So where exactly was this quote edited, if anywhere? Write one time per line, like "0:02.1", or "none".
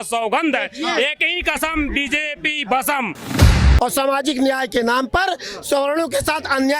0:03.4